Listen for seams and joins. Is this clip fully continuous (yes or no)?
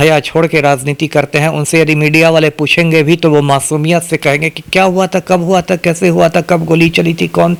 yes